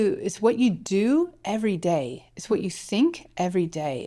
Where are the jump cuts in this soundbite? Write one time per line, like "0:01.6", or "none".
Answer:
none